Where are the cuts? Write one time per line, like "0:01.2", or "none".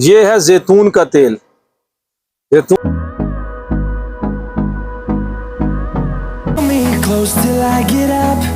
0:02.8
0:06.6